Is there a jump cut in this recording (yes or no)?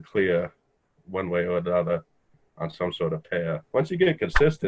yes